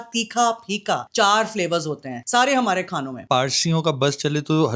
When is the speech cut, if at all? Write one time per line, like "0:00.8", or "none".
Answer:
0:01.1
0:02.1
0:03.2